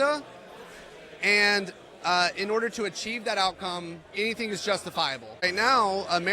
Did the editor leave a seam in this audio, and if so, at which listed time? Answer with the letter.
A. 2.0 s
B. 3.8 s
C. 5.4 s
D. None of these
C